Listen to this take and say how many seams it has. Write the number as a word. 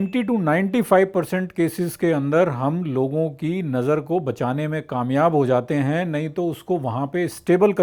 zero